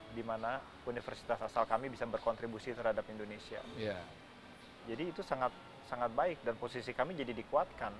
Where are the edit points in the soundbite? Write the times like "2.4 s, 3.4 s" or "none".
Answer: none

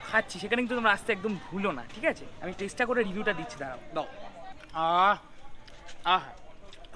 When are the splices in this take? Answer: none

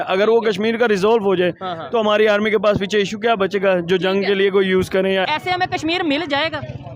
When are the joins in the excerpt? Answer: 5.3 s

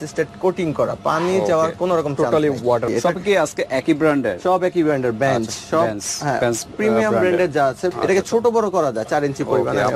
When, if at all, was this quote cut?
2.9 s, 7.9 s

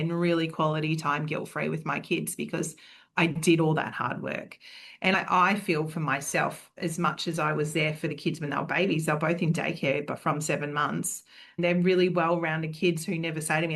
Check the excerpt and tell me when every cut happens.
5.1 s

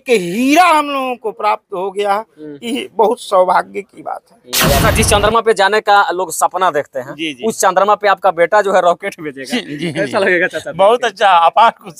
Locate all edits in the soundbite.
4.8 s

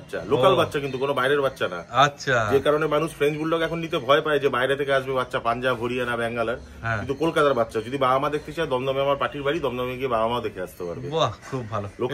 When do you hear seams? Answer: none

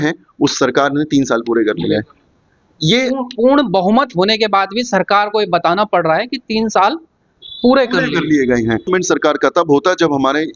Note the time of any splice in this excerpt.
8.9 s

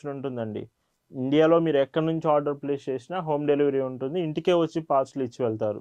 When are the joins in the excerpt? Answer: none

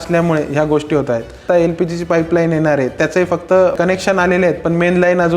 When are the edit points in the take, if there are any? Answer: 1.4 s, 3.8 s

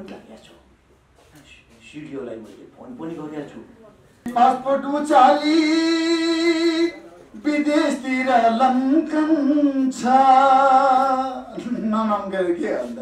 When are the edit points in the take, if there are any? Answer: 4.2 s

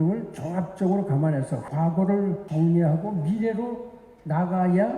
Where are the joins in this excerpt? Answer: 1.6 s, 2.4 s

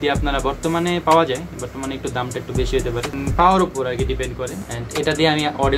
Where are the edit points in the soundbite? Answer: 3.1 s, 4.7 s

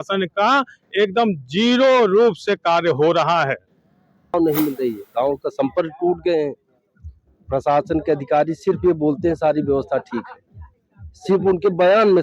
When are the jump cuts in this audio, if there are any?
4.3 s

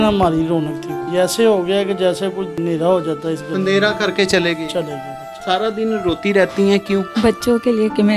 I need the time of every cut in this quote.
0.9 s, 2.6 s, 5.4 s, 7.1 s

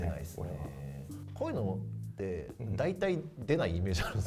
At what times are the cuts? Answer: none

